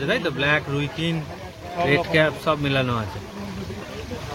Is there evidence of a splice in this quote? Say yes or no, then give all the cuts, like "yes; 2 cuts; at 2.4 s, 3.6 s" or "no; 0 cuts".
no; 0 cuts